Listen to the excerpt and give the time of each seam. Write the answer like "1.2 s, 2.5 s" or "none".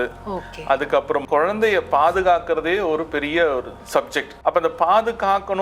1.2 s, 4.2 s